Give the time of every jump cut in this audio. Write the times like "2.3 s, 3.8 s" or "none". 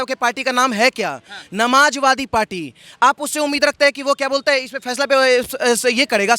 none